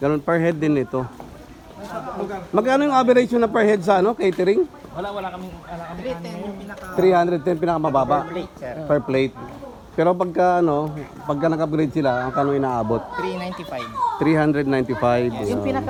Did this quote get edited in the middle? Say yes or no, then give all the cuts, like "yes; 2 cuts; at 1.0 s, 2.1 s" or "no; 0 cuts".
no; 0 cuts